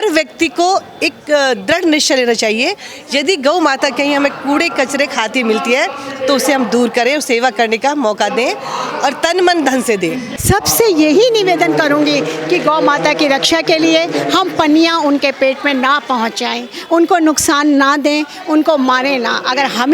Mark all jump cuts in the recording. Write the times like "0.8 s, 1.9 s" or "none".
10.3 s